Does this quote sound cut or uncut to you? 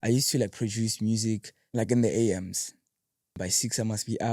cut